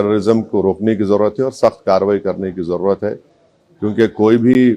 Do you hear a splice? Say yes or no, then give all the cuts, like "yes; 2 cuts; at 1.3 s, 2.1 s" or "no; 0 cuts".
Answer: no; 0 cuts